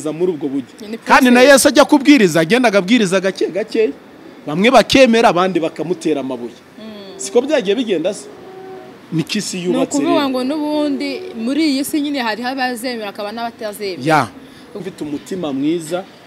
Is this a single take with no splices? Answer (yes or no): no